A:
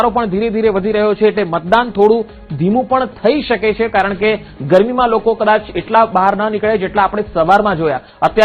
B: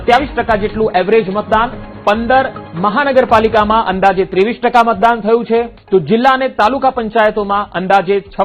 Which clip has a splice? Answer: B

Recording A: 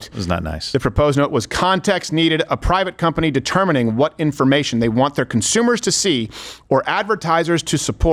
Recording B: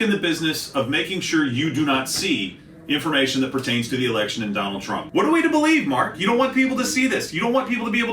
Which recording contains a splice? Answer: B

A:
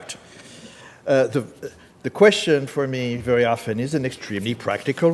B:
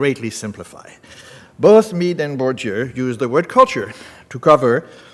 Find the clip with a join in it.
A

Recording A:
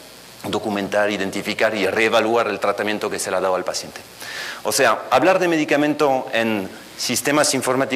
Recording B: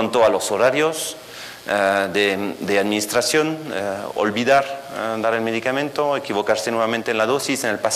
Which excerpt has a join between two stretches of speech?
B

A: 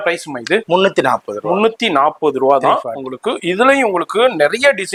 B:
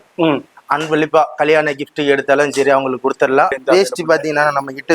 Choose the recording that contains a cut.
B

